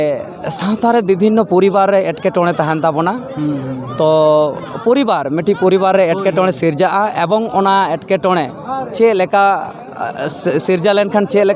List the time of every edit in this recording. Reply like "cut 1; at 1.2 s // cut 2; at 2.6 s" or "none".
none